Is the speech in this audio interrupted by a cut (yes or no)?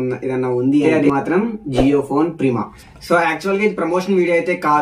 yes